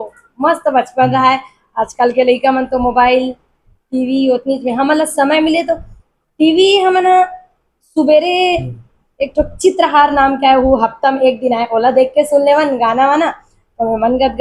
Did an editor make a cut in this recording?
no; 0 cuts

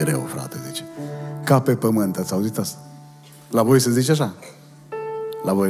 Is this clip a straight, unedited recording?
yes; 0 cuts

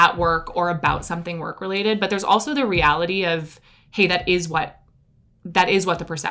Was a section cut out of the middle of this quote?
no; 0 cuts

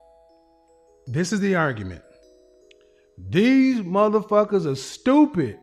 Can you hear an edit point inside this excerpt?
yes; 1 cut; at 1.0 s

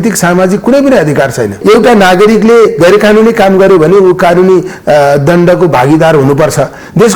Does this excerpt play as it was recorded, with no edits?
no; 1 cut; at 1.6 s

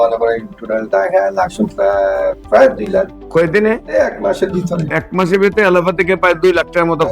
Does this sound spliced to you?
no; 0 cuts

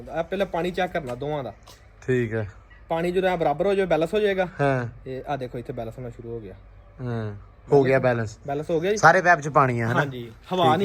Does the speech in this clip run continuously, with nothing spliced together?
yes; 0 cuts

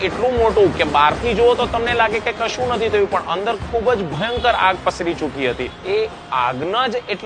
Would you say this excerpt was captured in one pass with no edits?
no; 1 cut; at 5.7 s

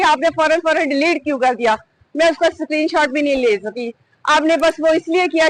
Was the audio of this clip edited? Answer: no; 0 cuts

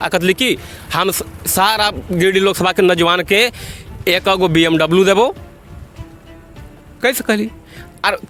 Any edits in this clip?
no; 0 cuts

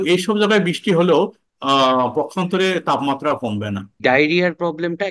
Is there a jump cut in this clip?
yes; 1 cut; at 4.0 s

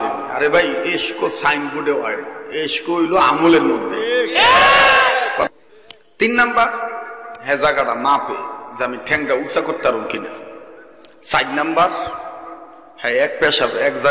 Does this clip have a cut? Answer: yes; 1 cut; at 5.5 s

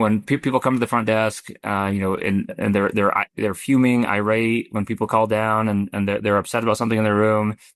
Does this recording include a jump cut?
no; 0 cuts

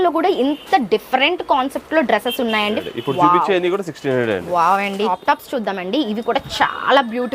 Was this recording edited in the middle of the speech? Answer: yes; 2 cuts; at 2.8 s, 5.1 s

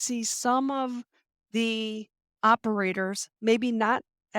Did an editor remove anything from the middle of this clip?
yes; 1 cut; at 3.2 s

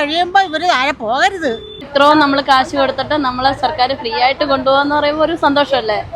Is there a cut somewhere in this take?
yes; 1 cut; at 1.9 s

